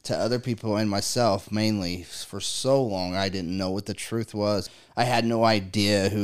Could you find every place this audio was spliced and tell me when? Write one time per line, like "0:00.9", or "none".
0:04.7